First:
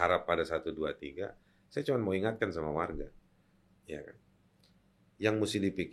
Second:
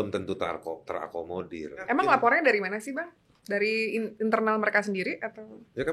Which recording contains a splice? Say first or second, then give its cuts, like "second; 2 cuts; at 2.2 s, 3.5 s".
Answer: second; 1 cut; at 1.8 s